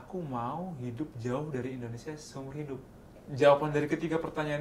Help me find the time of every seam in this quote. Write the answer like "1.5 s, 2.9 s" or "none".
3.2 s